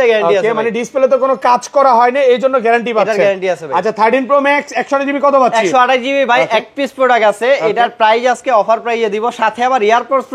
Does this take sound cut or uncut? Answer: uncut